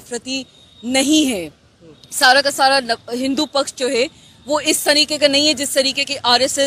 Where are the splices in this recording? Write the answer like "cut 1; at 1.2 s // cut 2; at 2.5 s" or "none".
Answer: none